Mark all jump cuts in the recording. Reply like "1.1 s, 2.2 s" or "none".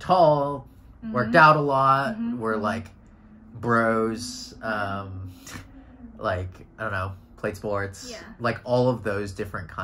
none